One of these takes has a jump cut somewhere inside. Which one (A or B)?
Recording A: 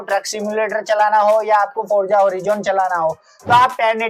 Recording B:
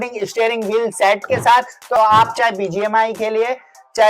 B